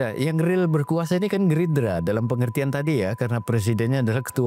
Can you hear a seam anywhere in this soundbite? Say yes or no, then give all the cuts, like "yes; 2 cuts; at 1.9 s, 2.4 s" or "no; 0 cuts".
no; 0 cuts